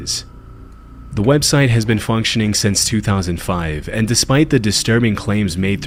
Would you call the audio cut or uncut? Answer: uncut